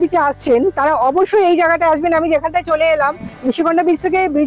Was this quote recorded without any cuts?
yes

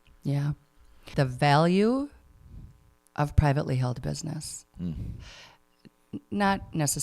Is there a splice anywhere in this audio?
yes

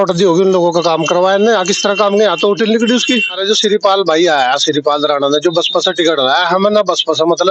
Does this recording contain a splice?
yes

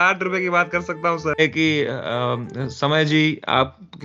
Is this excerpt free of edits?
no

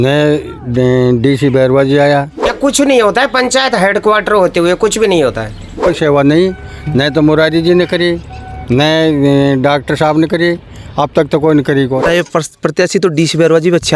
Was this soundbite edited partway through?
yes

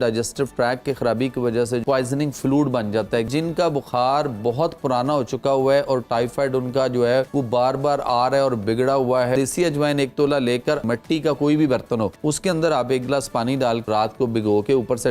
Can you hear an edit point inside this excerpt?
yes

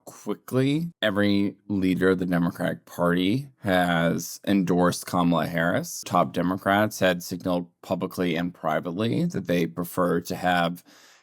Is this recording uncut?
no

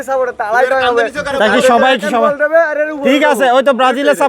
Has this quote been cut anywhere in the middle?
no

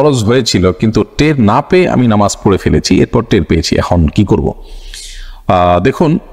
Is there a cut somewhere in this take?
no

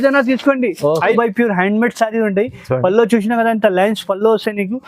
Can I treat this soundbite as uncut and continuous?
no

